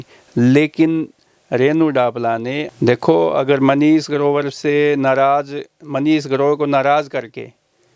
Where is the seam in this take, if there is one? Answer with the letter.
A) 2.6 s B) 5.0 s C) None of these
A